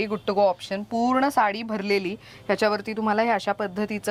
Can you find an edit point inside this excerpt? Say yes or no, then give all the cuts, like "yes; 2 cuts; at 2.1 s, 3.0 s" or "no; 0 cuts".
no; 0 cuts